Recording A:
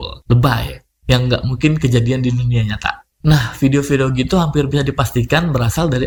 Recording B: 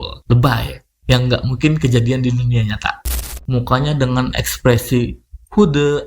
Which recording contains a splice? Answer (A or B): B